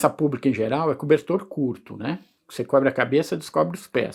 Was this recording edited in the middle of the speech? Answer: yes; 1 cut; at 2.4 s

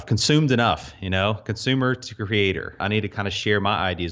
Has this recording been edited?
yes; 1 cut; at 2.8 s

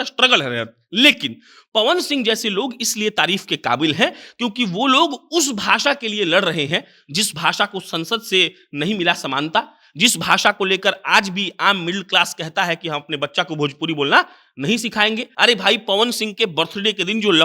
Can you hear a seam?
yes; 1 cut; at 15.3 s

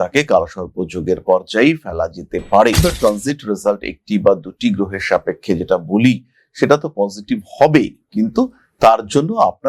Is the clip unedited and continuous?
no; 1 cut; at 2.8 s

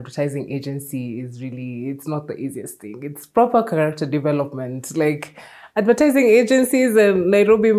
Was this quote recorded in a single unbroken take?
yes; 0 cuts

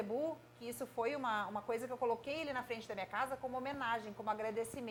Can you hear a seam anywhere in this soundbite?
no; 0 cuts

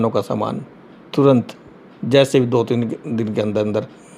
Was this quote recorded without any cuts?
yes; 0 cuts

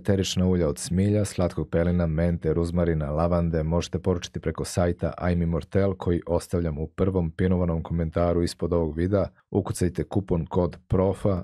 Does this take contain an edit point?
no; 0 cuts

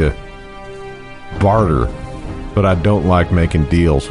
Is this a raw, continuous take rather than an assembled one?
yes; 0 cuts

